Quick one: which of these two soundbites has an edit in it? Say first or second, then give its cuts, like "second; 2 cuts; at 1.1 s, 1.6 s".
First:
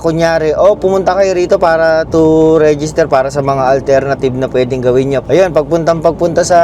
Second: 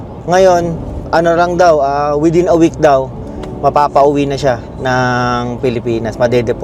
first; 1 cut; at 5.2 s